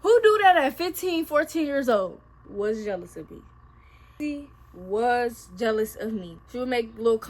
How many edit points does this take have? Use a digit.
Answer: 3